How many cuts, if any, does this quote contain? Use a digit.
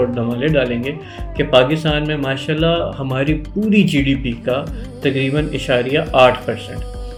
0